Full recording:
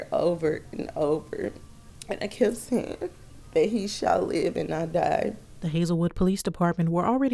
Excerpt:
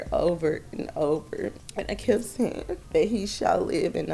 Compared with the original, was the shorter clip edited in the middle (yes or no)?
yes